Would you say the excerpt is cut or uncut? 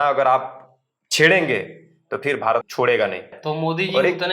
cut